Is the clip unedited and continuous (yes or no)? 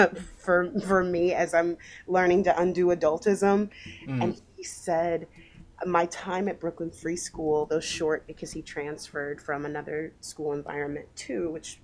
yes